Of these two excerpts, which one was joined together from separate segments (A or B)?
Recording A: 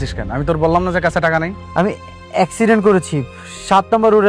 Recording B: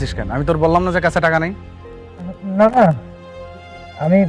A